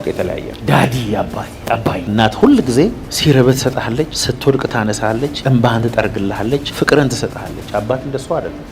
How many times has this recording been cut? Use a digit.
5